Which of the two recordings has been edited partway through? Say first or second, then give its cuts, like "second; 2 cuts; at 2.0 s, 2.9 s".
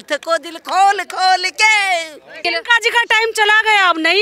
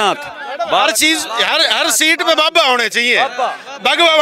first; 1 cut; at 2.4 s